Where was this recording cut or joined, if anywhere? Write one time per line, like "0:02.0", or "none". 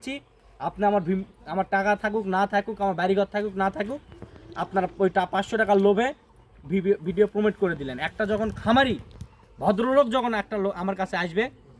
none